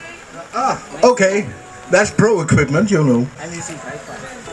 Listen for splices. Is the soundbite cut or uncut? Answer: cut